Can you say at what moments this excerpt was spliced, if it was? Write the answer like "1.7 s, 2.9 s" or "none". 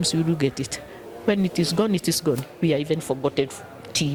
none

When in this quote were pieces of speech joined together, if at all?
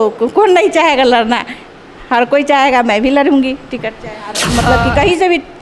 4.5 s

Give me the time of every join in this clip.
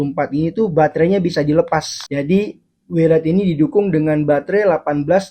2.0 s

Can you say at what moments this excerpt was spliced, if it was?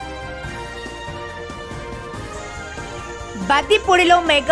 0.9 s, 2.3 s

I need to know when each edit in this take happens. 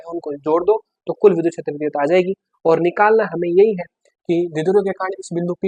none

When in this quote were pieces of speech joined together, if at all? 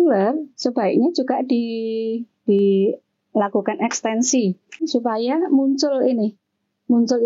none

